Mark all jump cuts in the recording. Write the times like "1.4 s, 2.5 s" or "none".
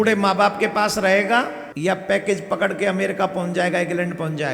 1.6 s